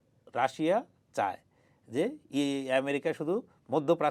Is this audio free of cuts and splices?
yes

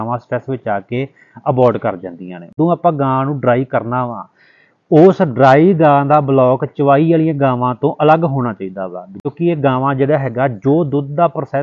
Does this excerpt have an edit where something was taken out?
yes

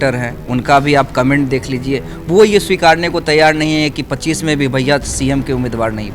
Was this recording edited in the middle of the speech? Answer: no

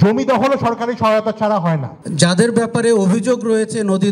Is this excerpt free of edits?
no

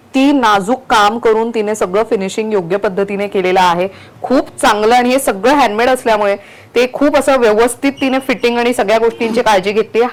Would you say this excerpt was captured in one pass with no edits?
yes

